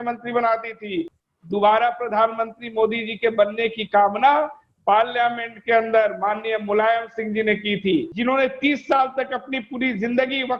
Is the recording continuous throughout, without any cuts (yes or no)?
no